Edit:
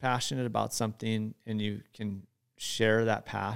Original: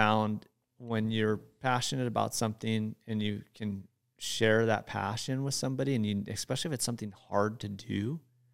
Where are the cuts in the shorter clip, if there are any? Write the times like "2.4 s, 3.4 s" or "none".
none